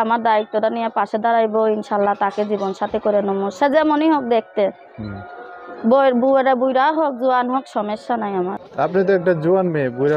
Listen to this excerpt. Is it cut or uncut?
cut